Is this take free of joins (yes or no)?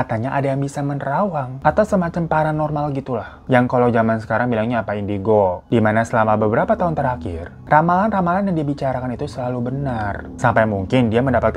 yes